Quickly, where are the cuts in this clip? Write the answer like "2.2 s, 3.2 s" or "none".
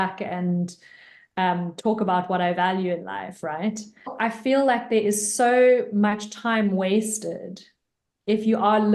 4.1 s

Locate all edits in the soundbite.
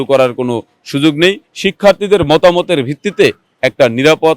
none

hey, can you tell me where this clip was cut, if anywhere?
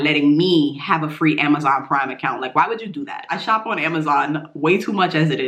3.3 s

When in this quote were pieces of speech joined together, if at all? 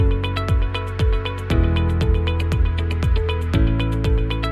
3.5 s

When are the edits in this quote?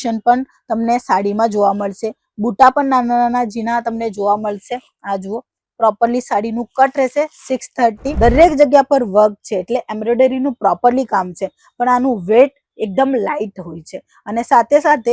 8.1 s

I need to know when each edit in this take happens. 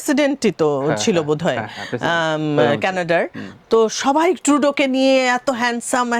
none

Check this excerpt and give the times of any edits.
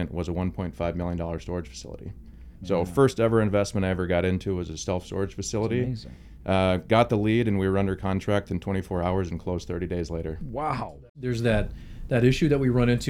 11.0 s

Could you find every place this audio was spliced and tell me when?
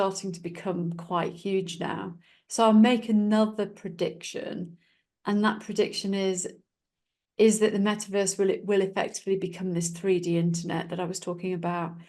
none

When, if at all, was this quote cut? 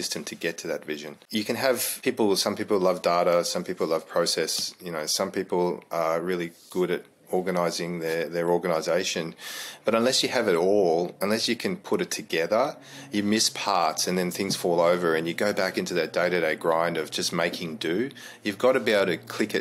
1.2 s, 1.9 s

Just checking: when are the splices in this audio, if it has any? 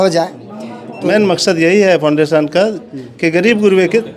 1.0 s

